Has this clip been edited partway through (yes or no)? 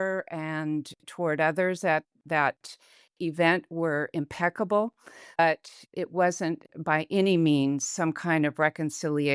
yes